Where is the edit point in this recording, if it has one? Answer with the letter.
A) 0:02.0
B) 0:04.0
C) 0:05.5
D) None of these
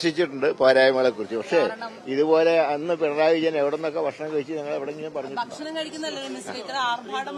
D